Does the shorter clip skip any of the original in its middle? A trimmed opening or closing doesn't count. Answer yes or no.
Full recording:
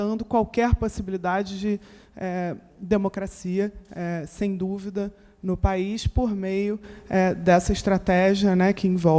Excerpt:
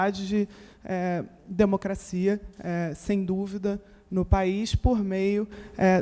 no